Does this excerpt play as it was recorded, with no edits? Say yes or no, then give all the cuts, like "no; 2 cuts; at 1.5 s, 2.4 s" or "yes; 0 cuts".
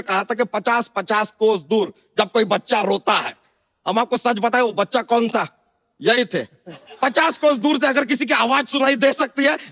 yes; 0 cuts